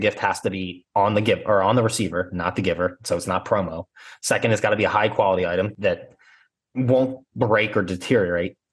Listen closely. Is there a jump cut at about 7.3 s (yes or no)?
no